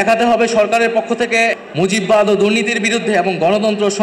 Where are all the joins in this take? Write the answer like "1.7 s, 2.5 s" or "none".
1.5 s